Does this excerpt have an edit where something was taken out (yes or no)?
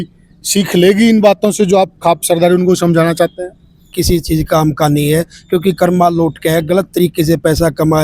yes